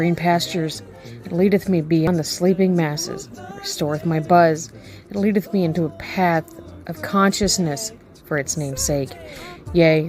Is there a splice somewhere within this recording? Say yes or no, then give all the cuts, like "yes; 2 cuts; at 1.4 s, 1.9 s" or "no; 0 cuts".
yes; 1 cut; at 2.1 s